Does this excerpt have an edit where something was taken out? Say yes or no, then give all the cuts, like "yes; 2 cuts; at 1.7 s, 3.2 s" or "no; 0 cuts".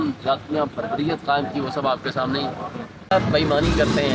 yes; 1 cut; at 3.1 s